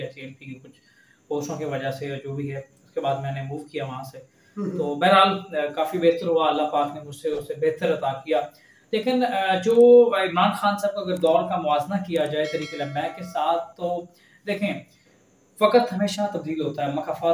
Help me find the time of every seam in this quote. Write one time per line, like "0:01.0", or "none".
none